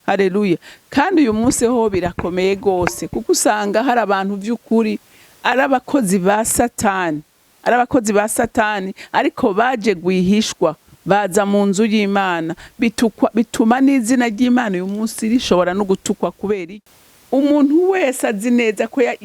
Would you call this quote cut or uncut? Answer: cut